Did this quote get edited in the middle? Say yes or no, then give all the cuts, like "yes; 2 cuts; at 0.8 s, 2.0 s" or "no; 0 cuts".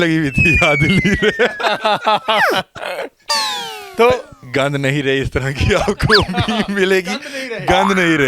yes; 1 cut; at 4.4 s